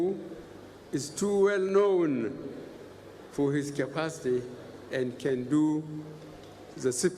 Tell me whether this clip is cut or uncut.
uncut